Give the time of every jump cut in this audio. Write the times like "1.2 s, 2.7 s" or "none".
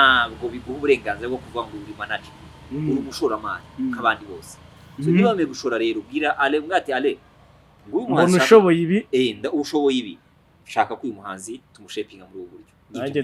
none